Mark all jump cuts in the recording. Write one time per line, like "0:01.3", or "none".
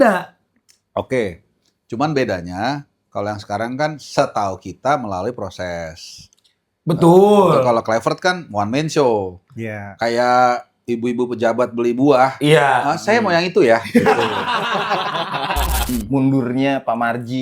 0:15.8